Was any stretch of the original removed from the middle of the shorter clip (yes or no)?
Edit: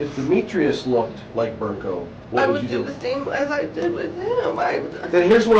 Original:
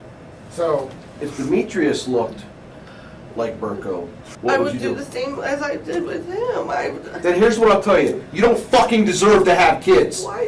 yes